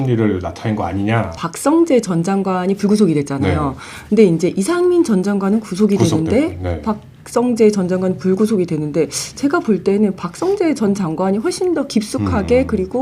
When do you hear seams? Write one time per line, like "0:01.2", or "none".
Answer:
0:01.4